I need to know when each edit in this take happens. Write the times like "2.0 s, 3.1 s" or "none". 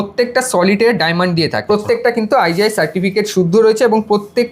1.7 s